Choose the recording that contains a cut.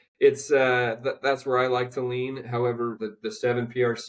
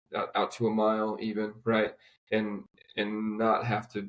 first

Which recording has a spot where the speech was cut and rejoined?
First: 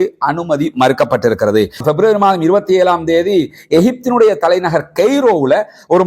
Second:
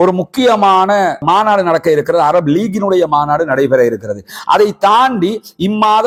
first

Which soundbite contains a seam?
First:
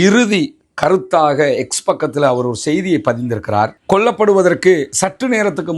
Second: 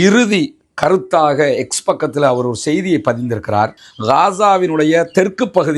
second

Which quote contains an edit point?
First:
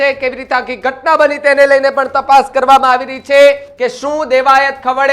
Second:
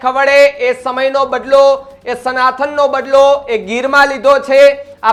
first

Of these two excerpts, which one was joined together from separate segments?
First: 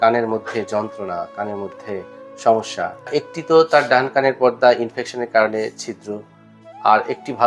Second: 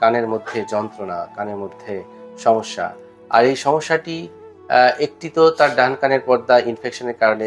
first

